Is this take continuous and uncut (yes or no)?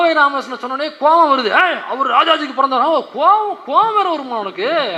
yes